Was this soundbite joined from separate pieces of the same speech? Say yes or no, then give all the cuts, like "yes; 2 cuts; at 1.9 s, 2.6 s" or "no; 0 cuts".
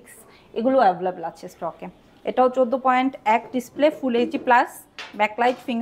no; 0 cuts